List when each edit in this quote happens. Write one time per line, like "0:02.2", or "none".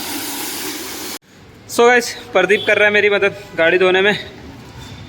0:01.2